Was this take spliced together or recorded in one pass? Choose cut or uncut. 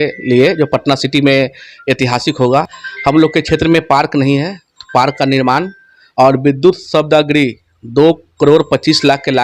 uncut